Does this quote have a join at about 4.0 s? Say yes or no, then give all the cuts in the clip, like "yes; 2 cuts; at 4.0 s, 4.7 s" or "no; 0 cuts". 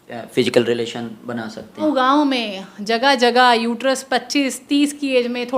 no; 1 cut; at 1.8 s